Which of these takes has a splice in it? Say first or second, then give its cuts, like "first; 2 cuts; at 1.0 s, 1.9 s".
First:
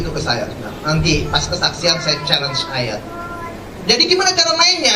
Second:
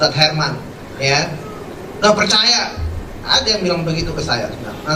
first; 1 cut; at 3.7 s